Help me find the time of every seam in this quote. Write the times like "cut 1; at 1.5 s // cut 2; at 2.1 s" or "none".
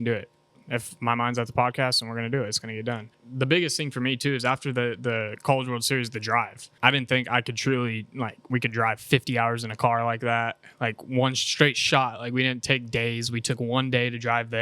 cut 1; at 0.9 s // cut 2; at 3.2 s // cut 3; at 6.6 s